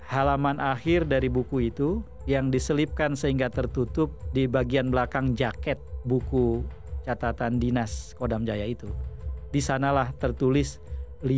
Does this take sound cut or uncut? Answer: uncut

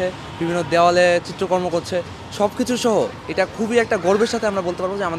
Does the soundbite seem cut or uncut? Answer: uncut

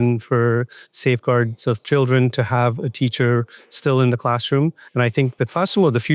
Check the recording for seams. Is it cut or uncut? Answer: cut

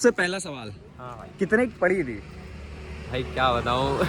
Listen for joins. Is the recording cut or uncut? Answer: uncut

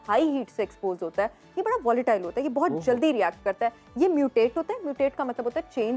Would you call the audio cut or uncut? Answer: uncut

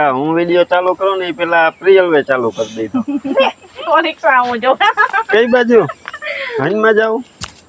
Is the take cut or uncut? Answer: cut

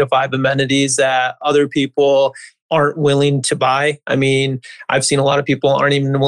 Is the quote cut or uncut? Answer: cut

